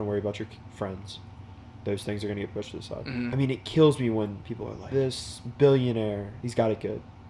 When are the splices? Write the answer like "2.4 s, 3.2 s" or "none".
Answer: 3.3 s, 4.9 s, 6.4 s